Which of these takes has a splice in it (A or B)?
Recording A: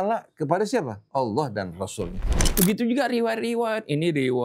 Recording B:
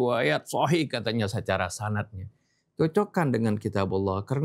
A